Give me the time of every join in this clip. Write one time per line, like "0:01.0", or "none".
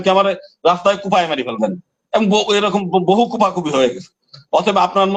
none